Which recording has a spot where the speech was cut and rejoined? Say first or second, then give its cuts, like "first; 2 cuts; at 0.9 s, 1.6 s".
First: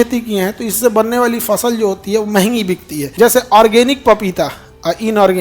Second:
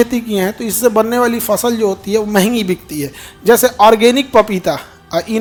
first; 1 cut; at 3.0 s